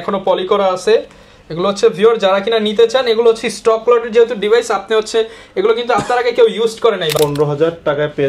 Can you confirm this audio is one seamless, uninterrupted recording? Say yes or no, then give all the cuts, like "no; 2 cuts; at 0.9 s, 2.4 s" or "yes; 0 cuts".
no; 1 cut; at 7.1 s